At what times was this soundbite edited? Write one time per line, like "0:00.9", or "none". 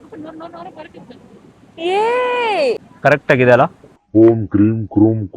0:02.9